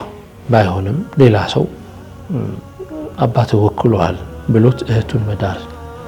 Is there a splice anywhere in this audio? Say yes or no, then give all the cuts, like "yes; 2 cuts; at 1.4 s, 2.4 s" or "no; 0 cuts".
no; 0 cuts